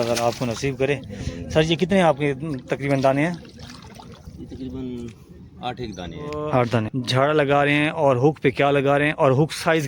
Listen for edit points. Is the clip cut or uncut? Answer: cut